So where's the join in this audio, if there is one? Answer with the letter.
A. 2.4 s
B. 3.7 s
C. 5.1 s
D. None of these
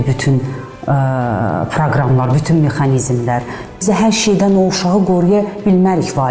B